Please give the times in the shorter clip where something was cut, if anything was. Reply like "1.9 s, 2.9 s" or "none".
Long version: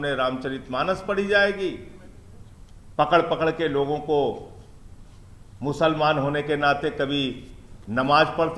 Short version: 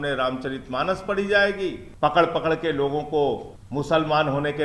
1.8 s, 3.5 s